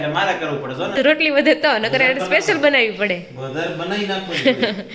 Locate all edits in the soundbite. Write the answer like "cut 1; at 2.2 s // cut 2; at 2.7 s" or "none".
cut 1; at 1.0 s